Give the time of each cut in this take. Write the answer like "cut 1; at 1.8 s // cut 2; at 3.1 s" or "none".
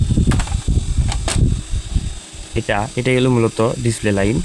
cut 1; at 2.5 s